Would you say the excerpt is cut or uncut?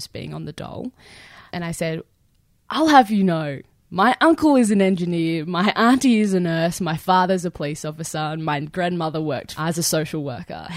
cut